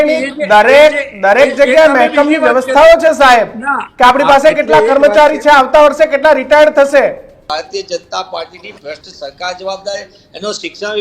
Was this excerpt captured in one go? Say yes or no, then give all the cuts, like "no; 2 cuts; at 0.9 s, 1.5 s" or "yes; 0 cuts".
no; 1 cut; at 7.5 s